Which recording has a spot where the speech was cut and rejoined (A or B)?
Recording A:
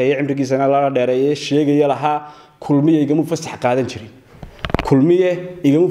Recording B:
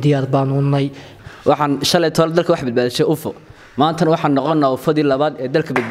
B